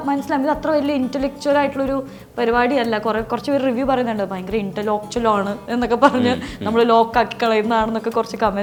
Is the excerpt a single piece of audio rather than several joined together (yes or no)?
yes